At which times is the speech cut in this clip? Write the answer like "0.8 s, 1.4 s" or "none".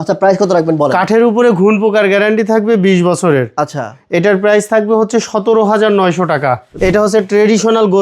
6.7 s